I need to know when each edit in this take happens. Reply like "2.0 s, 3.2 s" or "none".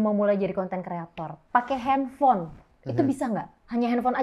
none